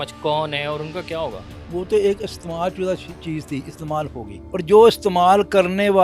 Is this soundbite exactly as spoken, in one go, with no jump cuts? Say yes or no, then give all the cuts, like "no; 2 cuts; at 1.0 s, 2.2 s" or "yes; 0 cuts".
no; 2 cuts; at 1.5 s, 4.4 s